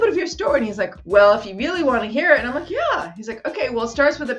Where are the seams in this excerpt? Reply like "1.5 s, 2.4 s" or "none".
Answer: 1.0 s

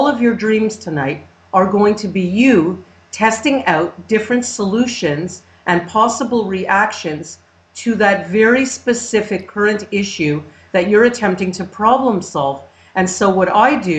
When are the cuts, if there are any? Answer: 2.6 s

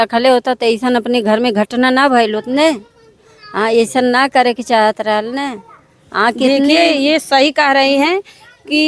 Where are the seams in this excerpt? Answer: none

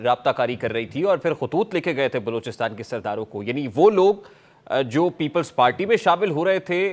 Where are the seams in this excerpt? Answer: none

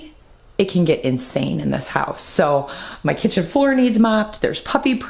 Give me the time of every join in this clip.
none

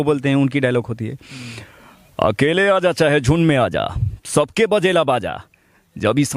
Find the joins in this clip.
none

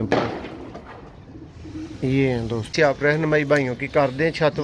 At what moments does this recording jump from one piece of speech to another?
2.7 s

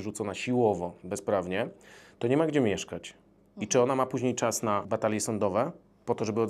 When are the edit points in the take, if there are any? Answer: 4.9 s

